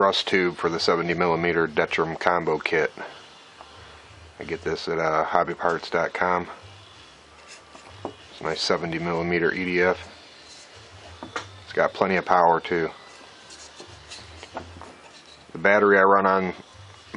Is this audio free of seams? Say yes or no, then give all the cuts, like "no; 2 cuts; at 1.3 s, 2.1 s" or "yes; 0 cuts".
no; 1 cut; at 14.6 s